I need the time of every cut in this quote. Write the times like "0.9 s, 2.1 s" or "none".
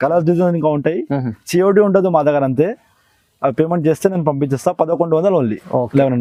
none